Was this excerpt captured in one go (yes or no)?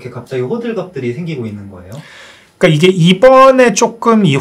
yes